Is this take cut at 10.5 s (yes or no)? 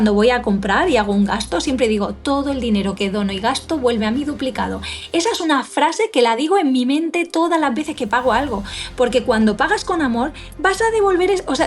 no